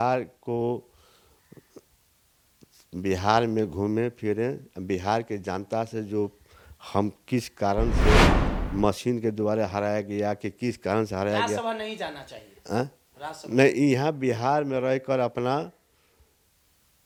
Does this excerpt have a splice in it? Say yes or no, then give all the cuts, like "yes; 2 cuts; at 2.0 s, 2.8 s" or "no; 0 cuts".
no; 0 cuts